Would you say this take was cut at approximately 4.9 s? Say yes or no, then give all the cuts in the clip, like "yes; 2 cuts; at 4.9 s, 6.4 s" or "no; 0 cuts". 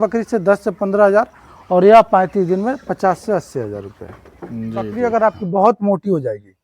yes; 1 cut; at 4.9 s